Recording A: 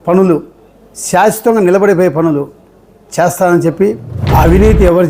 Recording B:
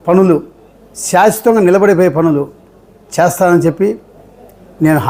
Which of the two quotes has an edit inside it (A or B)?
A